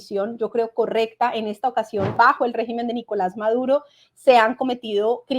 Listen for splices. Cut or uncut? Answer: cut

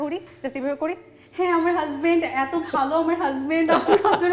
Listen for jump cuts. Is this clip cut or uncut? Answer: uncut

